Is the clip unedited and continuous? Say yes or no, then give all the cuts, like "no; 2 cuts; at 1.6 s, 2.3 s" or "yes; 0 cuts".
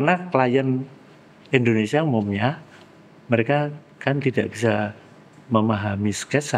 yes; 0 cuts